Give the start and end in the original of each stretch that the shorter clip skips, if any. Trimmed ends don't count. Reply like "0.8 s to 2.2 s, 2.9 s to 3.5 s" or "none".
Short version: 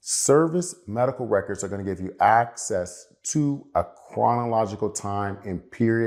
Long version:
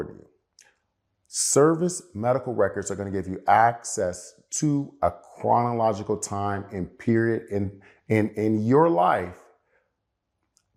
none

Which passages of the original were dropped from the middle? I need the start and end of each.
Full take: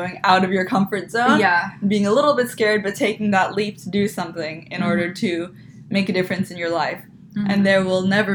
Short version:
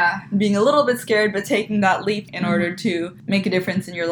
3.8 s to 4.7 s, 5.5 s to 5.8 s

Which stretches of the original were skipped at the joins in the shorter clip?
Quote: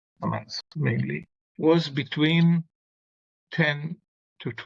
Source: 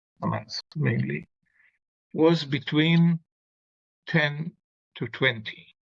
1.4 s to 1.9 s

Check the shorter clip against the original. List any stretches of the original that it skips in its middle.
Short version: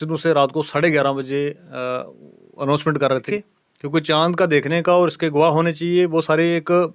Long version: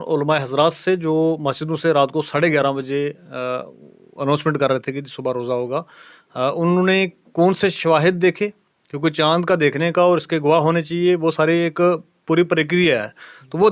4.9 s to 8.4 s

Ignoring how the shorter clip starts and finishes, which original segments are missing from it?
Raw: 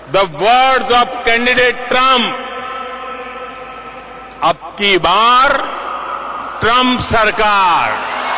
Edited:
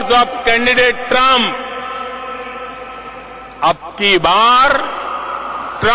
none

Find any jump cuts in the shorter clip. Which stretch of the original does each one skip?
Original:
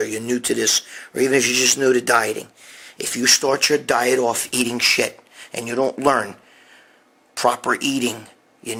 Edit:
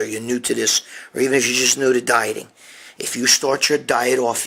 none

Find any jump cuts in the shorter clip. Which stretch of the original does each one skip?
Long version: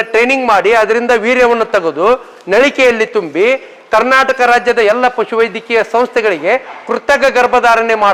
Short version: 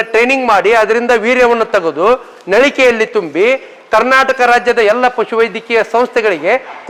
none

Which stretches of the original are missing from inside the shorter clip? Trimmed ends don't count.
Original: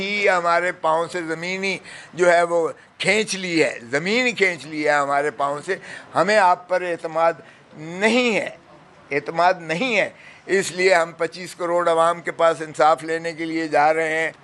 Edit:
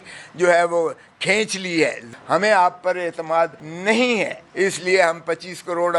3.8 s to 5.9 s, 7.5 s to 7.8 s, 8.6 s to 10.3 s

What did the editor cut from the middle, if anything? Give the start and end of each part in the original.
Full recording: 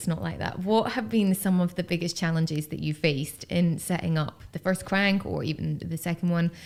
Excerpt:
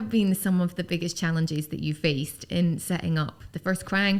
none

